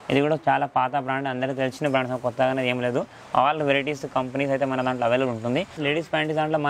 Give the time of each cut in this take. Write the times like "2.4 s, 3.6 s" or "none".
5.8 s